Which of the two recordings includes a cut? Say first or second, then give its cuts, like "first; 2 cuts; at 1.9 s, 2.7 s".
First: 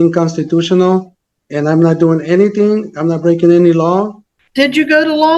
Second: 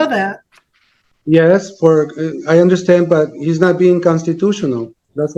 first; 1 cut; at 4.2 s